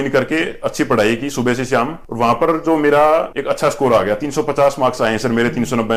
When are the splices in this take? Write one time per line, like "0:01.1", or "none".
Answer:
none